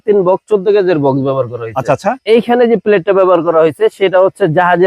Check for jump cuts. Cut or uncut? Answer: cut